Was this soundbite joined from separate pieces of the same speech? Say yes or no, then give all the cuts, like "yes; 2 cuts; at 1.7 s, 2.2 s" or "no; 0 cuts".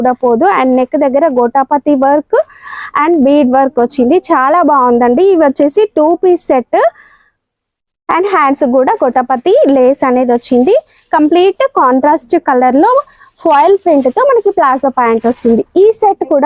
no; 0 cuts